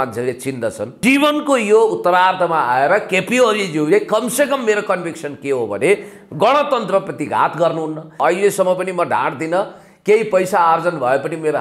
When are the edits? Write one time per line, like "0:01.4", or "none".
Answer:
0:00.9
0:08.2